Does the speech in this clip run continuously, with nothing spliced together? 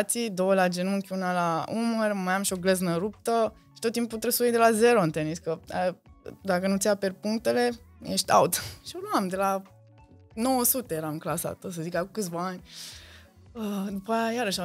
yes; 0 cuts

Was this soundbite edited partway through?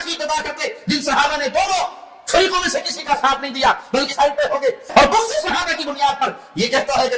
no; 0 cuts

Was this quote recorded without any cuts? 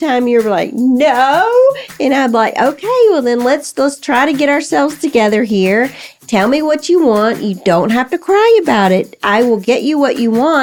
yes; 0 cuts

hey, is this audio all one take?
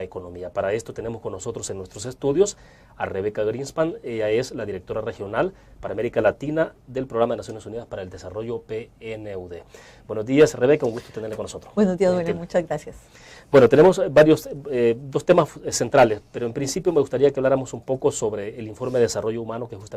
no; 1 cut; at 15.5 s

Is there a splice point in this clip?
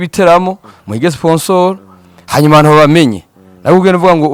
no; 0 cuts

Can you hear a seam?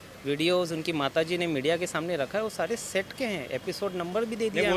no; 0 cuts

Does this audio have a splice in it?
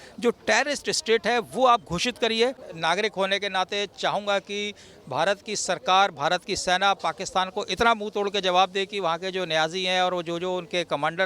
yes; 1 cut; at 2.7 s

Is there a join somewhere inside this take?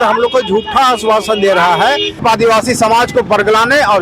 yes; 1 cut; at 2.2 s

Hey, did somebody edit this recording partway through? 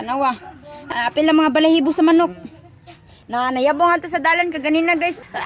yes; 1 cut; at 0.9 s

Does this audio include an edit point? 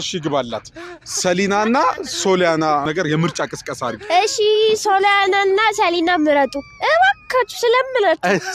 yes; 1 cut; at 2.8 s

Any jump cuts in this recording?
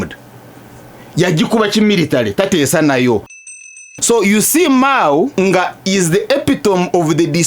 yes; 2 cuts; at 3.4 s, 5.3 s

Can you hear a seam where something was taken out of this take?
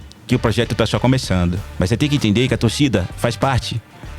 yes; 1 cut; at 1.6 s

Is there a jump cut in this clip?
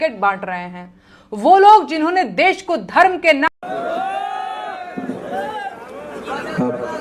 yes; 1 cut; at 3.5 s

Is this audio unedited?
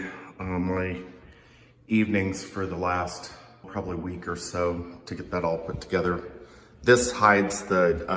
no; 1 cut; at 3.7 s

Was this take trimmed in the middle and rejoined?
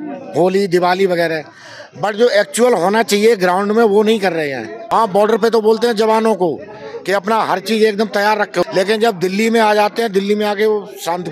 yes; 2 cuts; at 4.9 s, 8.6 s

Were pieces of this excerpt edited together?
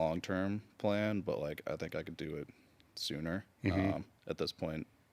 no; 0 cuts

